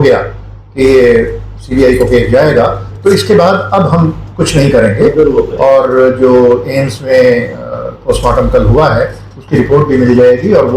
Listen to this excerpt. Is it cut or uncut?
uncut